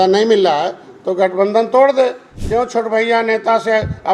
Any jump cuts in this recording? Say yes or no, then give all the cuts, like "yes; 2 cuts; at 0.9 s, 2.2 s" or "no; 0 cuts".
no; 0 cuts